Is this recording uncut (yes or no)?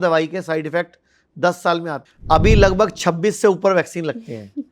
no